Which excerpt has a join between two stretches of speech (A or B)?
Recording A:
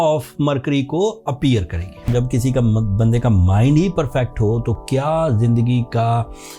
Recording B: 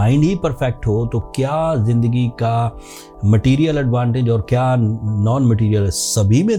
A